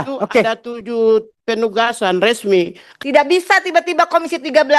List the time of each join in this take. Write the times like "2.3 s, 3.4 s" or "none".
2.8 s

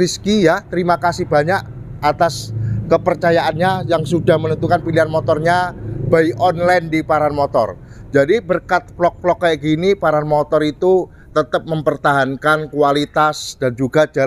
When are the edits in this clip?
none

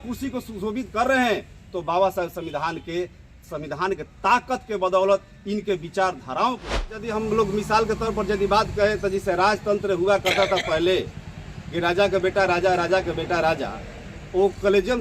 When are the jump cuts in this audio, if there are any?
7.1 s

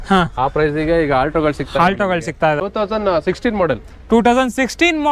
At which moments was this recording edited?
2.6 s

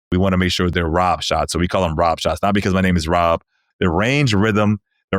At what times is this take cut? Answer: 0.7 s, 3.7 s

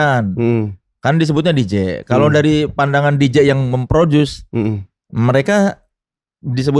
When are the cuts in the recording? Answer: none

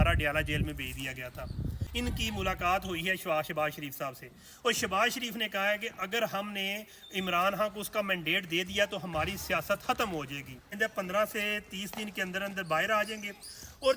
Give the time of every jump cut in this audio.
1.8 s, 10.8 s

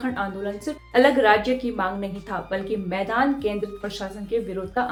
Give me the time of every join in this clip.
none

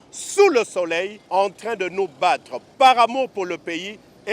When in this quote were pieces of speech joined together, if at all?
1.2 s, 2.6 s

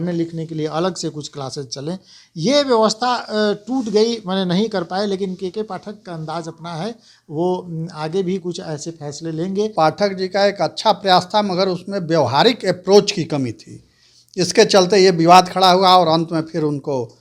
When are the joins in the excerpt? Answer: 9.7 s

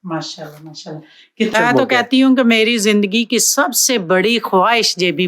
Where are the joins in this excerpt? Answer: 1.5 s

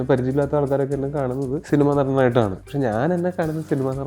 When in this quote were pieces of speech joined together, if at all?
1.6 s, 2.6 s

